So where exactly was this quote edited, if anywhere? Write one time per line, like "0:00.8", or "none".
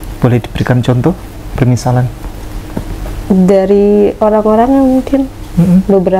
none